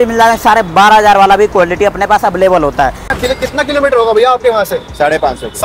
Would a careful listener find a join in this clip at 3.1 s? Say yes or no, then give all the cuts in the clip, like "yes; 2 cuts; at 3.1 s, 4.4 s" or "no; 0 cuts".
yes; 1 cut; at 3.1 s